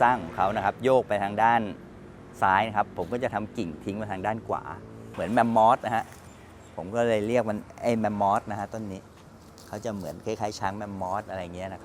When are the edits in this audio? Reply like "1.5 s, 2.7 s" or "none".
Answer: 5.1 s

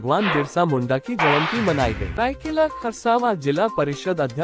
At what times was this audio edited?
2.1 s

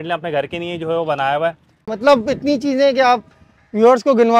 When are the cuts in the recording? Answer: 1.9 s

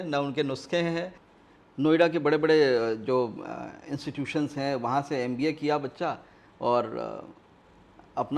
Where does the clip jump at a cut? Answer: 1.2 s

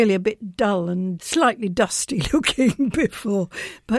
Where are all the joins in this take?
1.1 s

